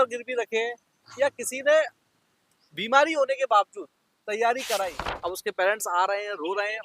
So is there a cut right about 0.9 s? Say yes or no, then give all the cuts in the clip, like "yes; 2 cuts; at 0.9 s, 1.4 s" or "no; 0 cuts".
no; 1 cut; at 5.0 s